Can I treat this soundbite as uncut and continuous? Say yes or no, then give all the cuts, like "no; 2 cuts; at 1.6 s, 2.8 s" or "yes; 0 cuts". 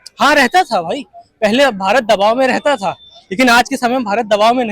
yes; 0 cuts